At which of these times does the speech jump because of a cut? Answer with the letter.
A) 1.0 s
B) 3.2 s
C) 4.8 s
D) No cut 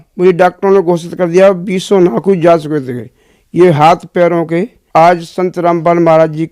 C